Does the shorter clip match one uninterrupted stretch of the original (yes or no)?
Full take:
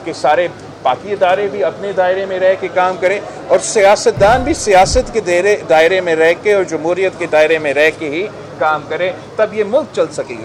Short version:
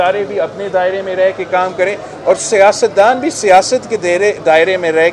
yes